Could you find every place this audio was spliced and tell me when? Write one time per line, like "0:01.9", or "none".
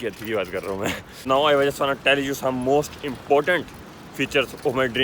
0:01.3